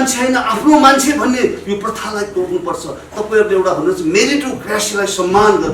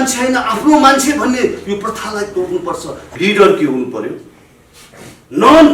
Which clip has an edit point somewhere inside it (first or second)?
second